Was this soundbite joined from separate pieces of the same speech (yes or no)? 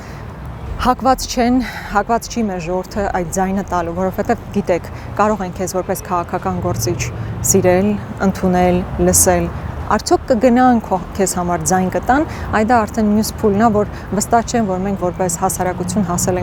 no